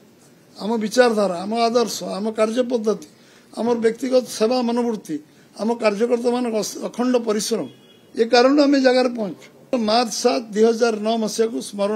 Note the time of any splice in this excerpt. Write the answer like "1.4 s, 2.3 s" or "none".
9.7 s